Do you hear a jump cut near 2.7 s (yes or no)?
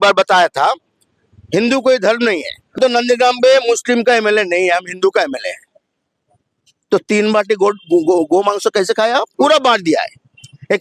yes